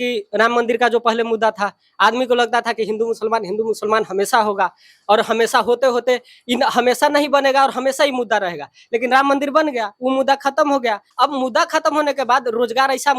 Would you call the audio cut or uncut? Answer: cut